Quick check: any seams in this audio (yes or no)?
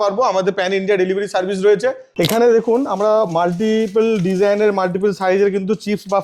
yes